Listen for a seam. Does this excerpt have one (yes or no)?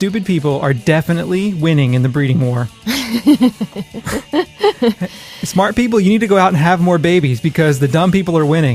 yes